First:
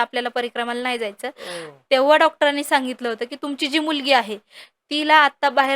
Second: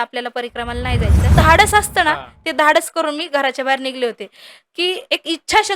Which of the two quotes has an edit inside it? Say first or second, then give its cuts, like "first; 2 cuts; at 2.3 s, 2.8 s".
second; 1 cut; at 1.3 s